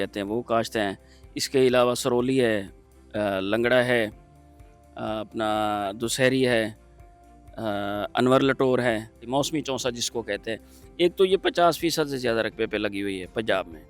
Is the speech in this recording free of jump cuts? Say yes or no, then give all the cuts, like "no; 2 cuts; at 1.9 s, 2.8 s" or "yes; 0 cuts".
no; 1 cut; at 9.3 s